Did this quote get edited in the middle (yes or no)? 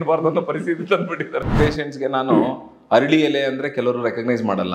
yes